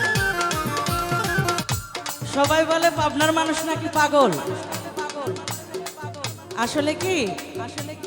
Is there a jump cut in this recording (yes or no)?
yes